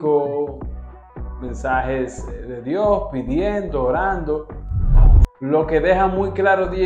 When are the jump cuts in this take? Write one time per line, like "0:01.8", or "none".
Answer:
0:04.9